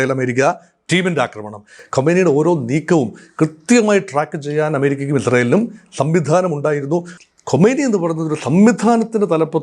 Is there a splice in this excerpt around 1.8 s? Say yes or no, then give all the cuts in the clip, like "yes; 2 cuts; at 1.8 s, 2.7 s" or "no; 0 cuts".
yes; 2 cuts; at 1.8 s, 7.2 s